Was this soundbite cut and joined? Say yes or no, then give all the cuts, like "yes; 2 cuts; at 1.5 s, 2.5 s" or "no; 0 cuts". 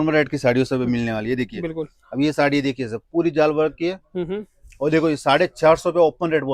no; 0 cuts